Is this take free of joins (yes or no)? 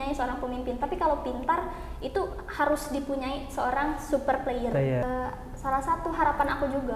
no